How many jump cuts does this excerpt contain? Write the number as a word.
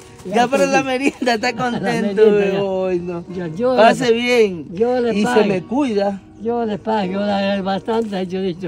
zero